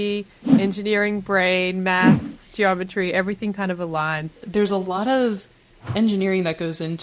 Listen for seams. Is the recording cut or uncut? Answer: cut